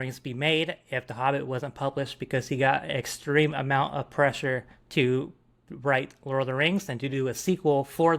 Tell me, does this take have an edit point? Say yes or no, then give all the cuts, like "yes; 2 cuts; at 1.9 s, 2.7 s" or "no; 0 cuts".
no; 0 cuts